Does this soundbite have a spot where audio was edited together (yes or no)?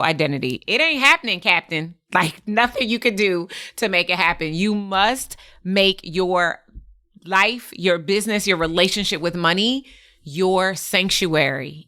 no